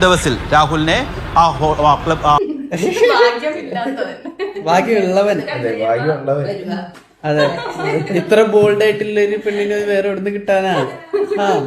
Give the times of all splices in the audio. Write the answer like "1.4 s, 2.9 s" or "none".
2.4 s